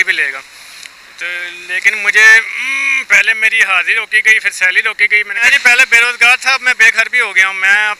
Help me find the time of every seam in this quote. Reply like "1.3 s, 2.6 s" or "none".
5.4 s

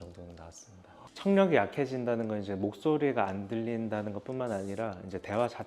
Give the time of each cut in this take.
1.1 s

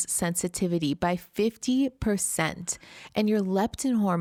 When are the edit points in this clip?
none

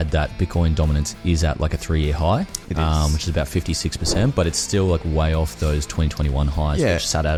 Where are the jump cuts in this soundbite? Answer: none

